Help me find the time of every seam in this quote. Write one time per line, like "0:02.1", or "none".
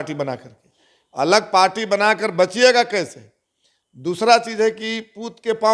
none